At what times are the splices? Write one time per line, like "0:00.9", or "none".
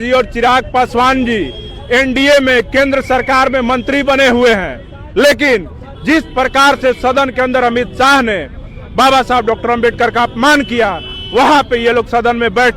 none